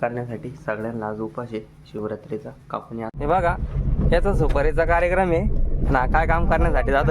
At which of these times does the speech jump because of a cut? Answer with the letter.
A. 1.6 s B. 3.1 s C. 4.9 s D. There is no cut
B